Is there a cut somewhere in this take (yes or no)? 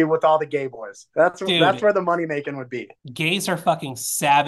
no